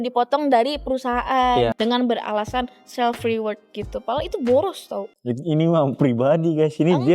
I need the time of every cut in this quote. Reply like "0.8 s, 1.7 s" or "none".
1.7 s